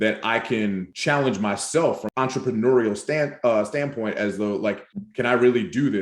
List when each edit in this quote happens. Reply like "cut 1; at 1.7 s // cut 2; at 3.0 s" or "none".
cut 1; at 0.9 s // cut 2; at 2.0 s // cut 3; at 4.9 s